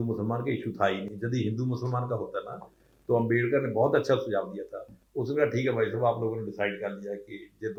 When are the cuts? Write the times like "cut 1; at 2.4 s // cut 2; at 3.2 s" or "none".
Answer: none